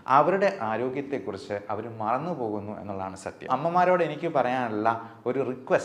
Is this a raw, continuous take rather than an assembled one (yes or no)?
no